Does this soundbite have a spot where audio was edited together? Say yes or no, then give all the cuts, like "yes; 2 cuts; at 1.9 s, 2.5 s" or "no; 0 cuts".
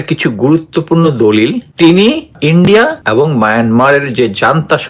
yes; 3 cuts; at 1.6 s, 2.3 s, 3.0 s